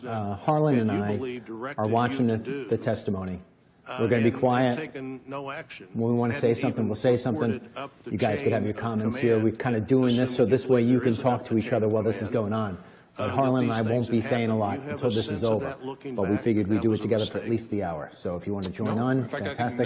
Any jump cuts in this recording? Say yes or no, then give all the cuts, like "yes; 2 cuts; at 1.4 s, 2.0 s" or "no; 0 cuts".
no; 0 cuts